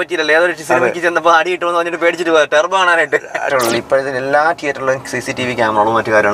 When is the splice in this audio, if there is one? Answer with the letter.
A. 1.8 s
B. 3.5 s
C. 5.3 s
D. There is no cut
B